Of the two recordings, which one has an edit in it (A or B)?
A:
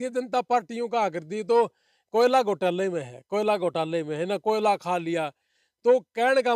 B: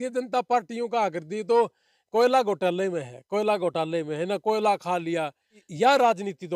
B